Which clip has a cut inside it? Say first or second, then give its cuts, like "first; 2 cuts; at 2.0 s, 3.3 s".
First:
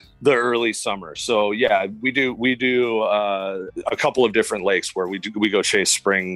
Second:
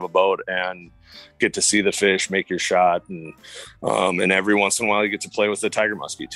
first; 1 cut; at 3.7 s